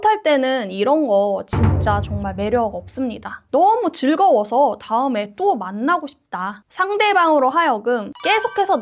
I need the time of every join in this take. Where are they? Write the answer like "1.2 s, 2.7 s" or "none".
3.3 s